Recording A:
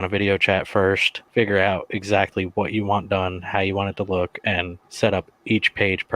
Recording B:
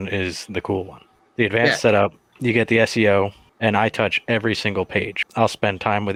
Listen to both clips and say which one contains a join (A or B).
A